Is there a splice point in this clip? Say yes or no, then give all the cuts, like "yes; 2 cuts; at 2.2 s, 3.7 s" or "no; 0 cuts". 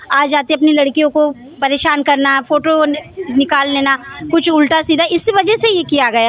no; 0 cuts